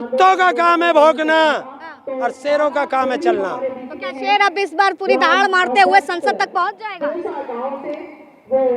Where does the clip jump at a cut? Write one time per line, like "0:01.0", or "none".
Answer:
none